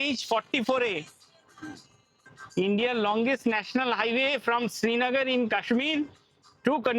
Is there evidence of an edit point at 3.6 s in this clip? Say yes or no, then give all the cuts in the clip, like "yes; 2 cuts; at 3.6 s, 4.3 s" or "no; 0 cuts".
no; 1 cut; at 2.3 s